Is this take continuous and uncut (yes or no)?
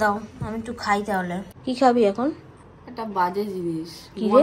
no